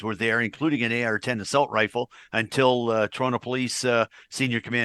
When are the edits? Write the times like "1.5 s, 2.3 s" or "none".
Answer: none